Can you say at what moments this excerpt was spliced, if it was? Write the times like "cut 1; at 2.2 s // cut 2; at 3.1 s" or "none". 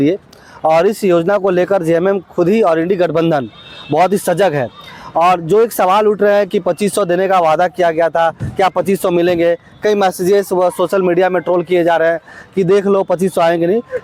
none